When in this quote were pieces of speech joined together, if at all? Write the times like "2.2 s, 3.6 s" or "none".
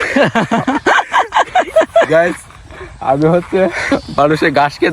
2.1 s, 3.9 s